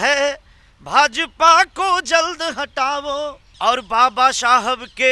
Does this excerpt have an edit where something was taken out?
yes; 1 cut; at 3.4 s

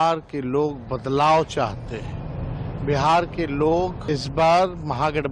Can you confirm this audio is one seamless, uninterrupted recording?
no; 1 cut; at 4.0 s

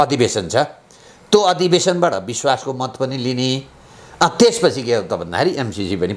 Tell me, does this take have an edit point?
no; 0 cuts

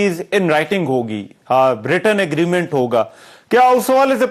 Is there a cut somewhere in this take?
no; 0 cuts

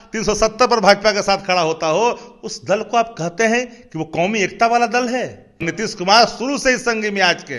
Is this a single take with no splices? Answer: no; 1 cut; at 5.7 s

